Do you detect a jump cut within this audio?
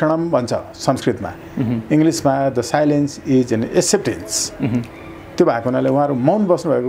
no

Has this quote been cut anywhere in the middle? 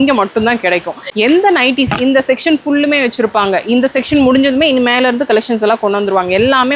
yes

